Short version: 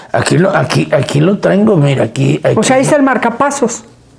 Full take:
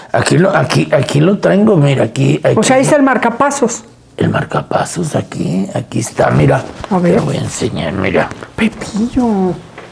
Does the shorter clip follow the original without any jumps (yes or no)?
yes